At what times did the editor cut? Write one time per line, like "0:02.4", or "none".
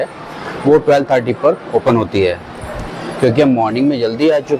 none